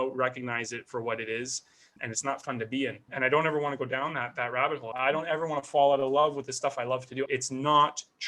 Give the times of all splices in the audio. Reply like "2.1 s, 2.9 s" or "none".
3.0 s, 4.9 s, 7.3 s